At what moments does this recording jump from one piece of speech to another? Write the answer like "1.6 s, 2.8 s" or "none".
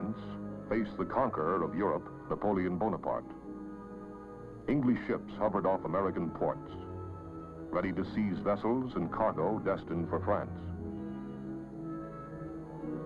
3.4 s